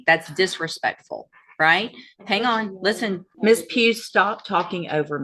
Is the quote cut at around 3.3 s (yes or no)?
yes